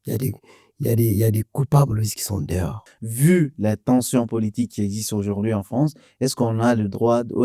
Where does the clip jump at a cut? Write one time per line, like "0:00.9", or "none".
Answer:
0:02.8